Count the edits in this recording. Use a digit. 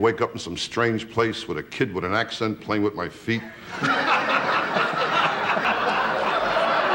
1